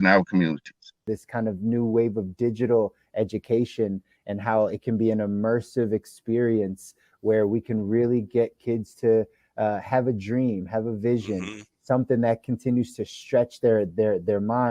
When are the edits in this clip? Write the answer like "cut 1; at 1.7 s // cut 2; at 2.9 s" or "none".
cut 1; at 1.1 s